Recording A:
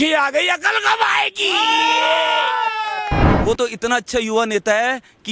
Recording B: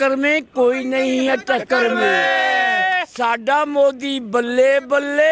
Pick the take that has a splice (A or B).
A